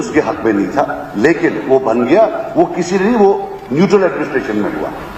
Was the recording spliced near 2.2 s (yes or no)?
yes